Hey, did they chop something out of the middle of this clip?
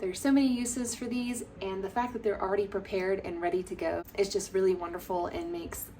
yes; 1 cut; at 4.1 s

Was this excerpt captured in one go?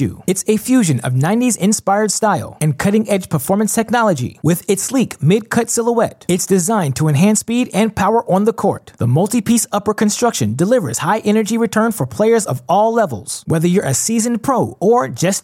yes; 0 cuts

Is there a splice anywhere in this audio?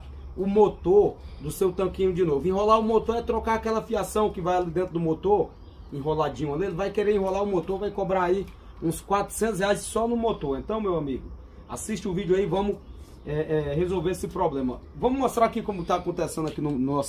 no; 0 cuts

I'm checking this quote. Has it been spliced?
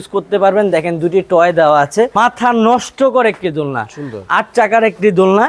yes; 1 cut; at 2.1 s

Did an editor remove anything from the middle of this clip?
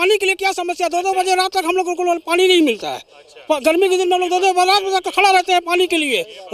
no; 0 cuts

